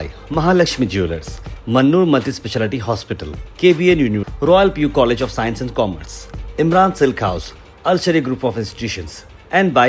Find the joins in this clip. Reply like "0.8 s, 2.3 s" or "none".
none